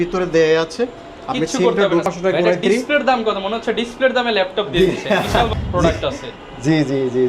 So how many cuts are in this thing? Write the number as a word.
two